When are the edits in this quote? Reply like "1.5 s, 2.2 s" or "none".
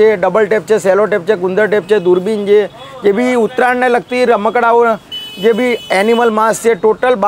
none